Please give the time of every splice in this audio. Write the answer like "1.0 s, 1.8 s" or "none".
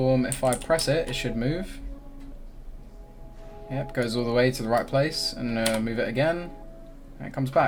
none